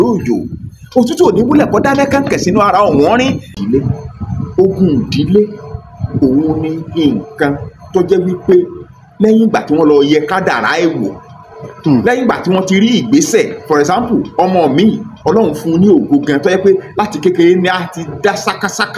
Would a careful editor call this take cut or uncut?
cut